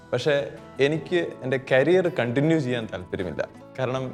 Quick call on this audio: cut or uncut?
uncut